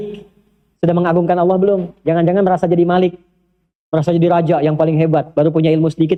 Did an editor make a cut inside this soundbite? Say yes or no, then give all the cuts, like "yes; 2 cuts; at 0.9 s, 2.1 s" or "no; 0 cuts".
no; 0 cuts